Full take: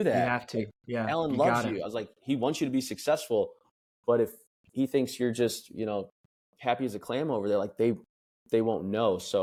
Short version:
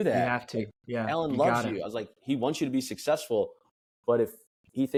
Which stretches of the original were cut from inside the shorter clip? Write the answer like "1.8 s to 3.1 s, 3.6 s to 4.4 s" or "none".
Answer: none